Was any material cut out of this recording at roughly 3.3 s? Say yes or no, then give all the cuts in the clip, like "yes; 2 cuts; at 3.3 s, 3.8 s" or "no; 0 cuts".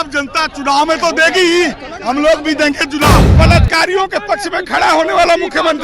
yes; 1 cut; at 3.3 s